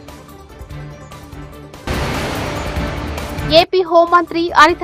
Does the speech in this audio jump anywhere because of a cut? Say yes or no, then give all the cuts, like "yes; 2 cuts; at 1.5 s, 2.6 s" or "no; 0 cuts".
yes; 2 cuts; at 1.8 s, 3.4 s